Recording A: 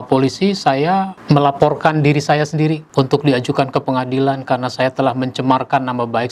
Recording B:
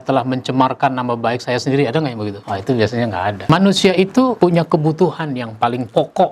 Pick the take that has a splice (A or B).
B